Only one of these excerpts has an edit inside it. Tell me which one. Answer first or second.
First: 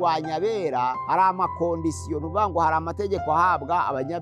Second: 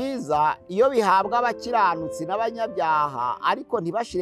first